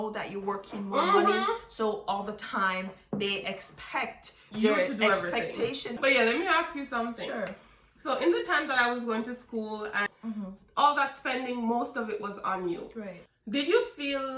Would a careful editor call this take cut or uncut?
cut